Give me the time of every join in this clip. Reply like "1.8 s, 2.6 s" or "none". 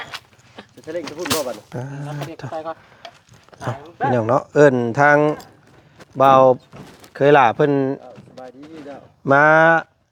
none